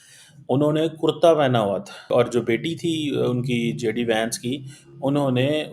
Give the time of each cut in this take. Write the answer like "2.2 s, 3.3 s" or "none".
2.1 s